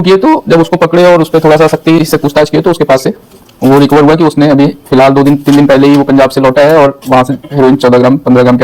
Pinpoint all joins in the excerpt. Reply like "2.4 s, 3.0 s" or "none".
none